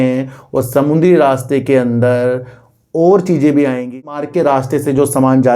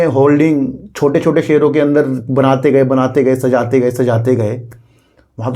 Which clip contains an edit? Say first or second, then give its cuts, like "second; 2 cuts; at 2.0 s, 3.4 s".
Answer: first; 1 cut; at 4.0 s